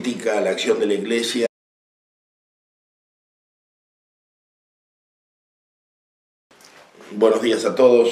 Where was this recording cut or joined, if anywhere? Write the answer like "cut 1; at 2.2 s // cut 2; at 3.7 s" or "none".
none